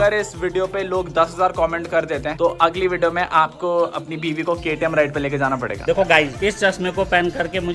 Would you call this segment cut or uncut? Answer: cut